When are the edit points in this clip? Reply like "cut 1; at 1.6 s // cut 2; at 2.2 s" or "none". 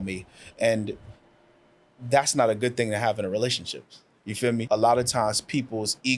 cut 1; at 4.6 s